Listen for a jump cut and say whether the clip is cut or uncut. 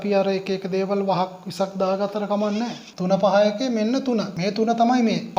cut